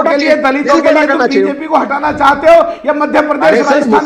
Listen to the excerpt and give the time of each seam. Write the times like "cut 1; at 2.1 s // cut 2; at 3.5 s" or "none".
none